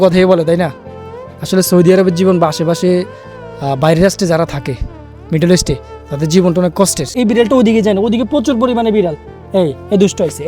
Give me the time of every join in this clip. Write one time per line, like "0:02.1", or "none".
0:07.1